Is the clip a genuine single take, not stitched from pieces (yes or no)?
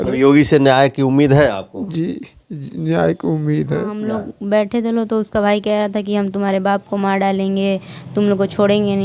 no